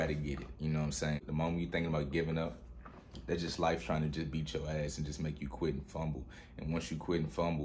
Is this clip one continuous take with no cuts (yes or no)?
no